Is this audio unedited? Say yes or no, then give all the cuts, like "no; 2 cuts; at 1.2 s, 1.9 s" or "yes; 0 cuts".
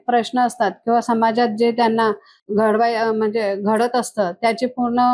yes; 0 cuts